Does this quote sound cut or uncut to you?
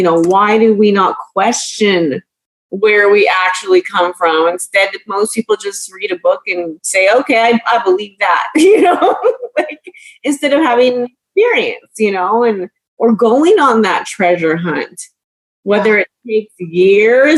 uncut